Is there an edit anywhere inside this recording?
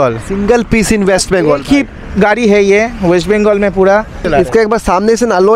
yes; 1 cut; at 4.2 s

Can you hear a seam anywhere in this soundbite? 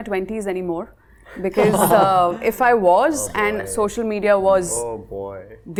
no; 0 cuts

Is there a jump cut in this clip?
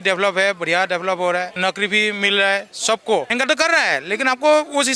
yes; 2 cuts; at 1.5 s, 3.3 s

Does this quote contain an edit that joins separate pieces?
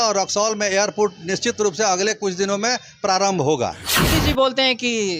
yes; 1 cut; at 4.1 s

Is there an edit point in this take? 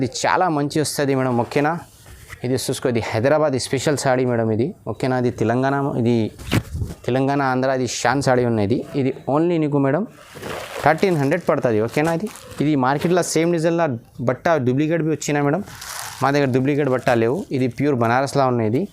no; 0 cuts

